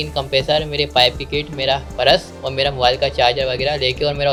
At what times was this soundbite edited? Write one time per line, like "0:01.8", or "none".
none